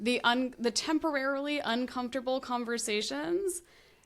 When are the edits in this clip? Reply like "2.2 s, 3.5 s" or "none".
none